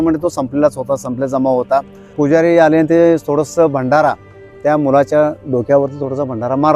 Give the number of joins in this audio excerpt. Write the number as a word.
one